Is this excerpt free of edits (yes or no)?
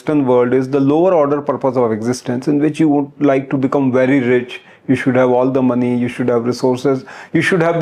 yes